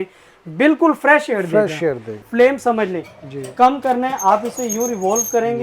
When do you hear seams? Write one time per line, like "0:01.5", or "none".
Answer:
0:02.1